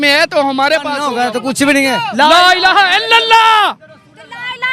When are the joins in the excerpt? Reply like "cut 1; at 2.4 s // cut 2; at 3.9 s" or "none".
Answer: cut 1; at 1.1 s